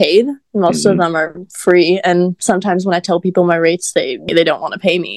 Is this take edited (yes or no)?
yes